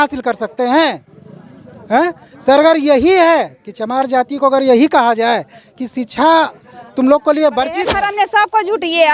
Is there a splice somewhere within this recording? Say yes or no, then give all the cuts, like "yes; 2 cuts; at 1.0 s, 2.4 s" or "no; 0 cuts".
yes; 1 cut; at 7.9 s